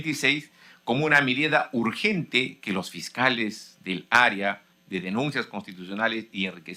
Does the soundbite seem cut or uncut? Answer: uncut